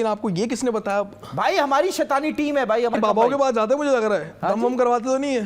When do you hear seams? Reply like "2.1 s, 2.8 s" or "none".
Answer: 2.9 s